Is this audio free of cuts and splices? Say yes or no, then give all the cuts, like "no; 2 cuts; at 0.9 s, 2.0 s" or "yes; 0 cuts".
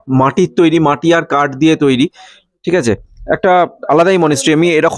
yes; 0 cuts